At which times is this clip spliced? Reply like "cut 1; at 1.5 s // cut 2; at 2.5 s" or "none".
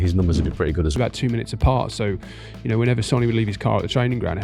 cut 1; at 0.9 s